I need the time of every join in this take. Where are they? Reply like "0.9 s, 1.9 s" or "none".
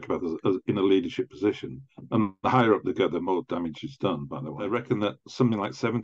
4.6 s